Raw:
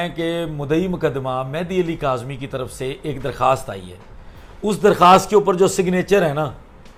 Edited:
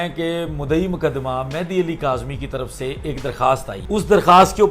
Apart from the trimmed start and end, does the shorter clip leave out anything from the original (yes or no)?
yes